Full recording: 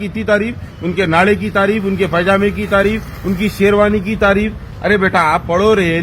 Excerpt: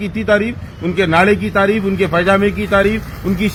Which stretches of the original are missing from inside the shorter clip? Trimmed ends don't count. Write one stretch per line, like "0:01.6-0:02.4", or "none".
none